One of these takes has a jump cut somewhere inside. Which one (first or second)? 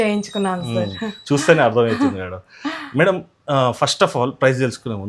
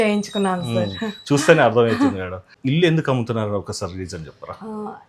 second